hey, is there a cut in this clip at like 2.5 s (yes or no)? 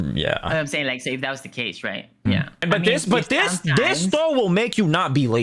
yes